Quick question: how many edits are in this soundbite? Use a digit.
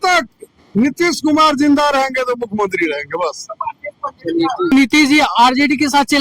1